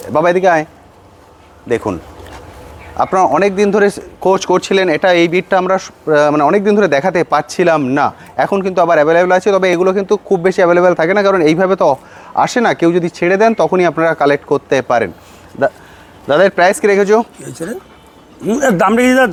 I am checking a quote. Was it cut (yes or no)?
no